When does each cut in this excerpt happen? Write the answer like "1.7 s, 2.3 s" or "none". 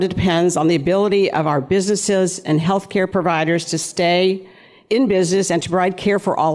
3.1 s, 5.6 s